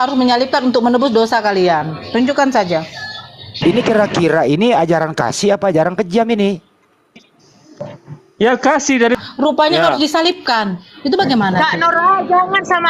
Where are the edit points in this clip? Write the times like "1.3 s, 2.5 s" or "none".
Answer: 3.6 s, 9.2 s